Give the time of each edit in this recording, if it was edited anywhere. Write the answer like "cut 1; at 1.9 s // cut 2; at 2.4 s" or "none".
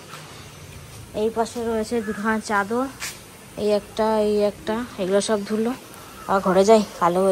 none